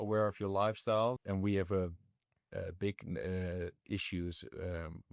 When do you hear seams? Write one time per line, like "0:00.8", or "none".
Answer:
0:01.2